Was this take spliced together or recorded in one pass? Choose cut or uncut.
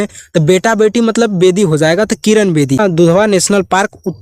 cut